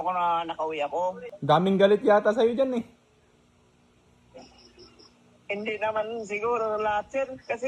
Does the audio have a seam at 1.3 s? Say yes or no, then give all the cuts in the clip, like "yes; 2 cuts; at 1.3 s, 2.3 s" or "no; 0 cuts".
yes; 1 cut; at 1.3 s